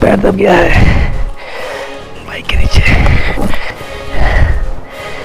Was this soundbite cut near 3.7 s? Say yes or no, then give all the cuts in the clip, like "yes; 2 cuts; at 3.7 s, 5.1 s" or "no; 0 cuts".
yes; 1 cut; at 3.7 s